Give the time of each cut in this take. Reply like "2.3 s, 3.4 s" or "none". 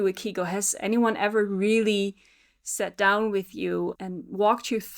4.0 s

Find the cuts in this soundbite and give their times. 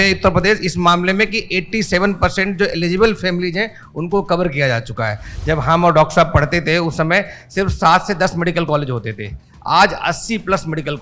5.3 s

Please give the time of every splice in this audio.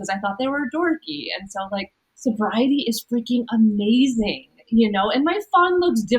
2.0 s

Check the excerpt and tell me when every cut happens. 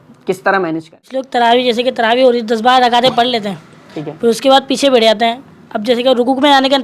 1.3 s

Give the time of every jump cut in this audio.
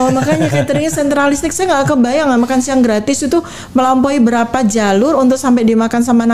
none

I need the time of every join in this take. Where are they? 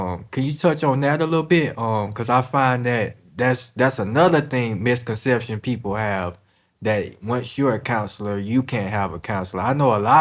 none

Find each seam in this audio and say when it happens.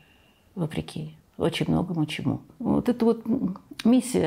2.5 s

